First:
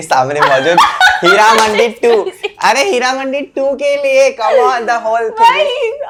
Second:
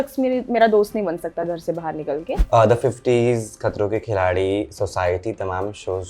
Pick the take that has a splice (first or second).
second